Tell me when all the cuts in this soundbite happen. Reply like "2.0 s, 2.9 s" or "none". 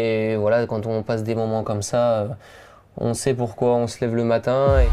none